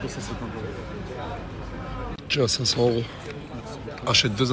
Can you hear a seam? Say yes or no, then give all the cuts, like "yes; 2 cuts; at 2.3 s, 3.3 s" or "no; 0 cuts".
yes; 1 cut; at 2.5 s